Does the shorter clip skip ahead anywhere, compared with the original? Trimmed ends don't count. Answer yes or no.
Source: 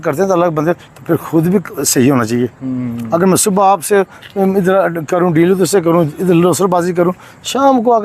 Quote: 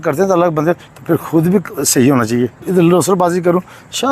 yes